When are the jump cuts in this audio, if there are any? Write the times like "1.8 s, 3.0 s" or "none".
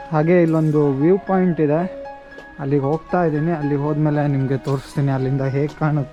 none